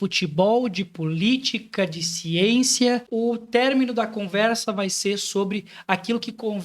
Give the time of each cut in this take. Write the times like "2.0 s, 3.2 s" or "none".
3.1 s